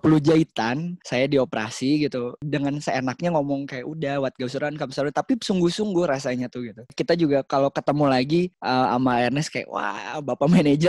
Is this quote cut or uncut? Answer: cut